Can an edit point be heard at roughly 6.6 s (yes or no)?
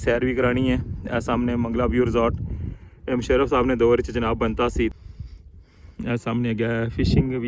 no